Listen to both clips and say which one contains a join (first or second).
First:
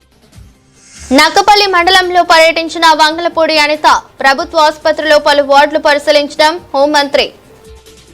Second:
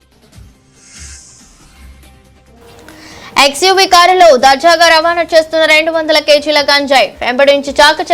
first